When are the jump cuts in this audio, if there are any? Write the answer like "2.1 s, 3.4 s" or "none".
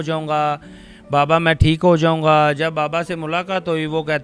none